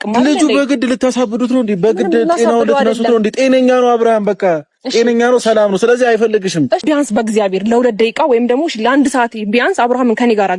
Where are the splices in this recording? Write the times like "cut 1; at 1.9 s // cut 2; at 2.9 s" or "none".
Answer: cut 1; at 6.8 s